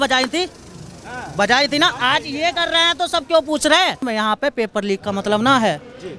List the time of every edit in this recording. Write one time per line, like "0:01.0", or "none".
0:04.0